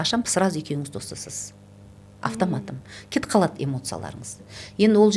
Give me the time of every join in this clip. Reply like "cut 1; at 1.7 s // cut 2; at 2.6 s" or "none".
none